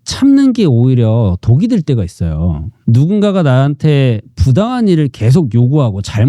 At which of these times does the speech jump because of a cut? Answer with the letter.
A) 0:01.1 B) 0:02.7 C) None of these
B